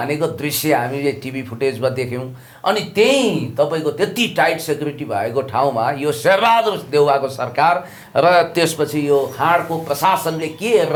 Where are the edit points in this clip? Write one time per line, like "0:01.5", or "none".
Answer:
none